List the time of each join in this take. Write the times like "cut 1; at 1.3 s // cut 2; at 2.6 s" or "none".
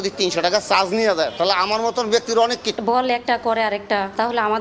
cut 1; at 2.8 s